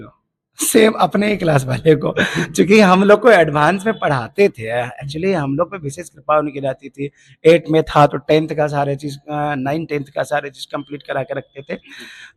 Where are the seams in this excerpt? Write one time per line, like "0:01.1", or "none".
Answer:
none